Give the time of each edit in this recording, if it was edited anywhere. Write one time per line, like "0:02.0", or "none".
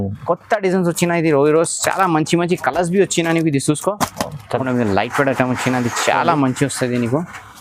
0:04.6